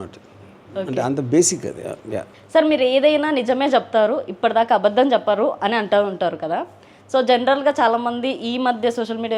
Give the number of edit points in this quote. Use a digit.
1